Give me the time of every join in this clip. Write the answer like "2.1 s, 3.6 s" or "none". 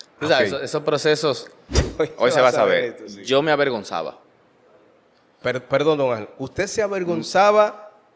1.8 s